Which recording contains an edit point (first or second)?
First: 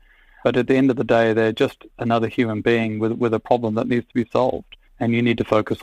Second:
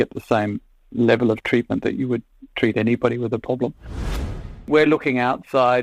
second